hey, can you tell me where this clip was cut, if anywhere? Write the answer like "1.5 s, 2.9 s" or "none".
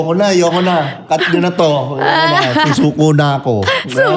none